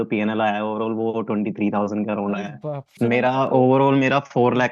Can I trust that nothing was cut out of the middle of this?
no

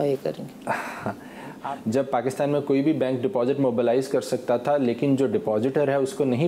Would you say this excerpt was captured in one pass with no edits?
no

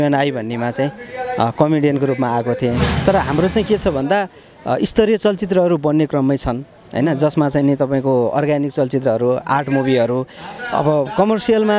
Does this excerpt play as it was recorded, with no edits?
no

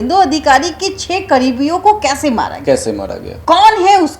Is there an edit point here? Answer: yes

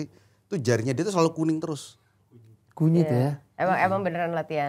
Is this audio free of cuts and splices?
yes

